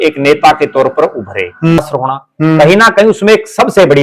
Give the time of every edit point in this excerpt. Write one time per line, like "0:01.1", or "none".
0:01.8